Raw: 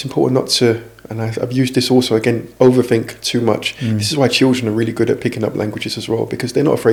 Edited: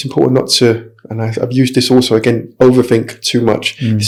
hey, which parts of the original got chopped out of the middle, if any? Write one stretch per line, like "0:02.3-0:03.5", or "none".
none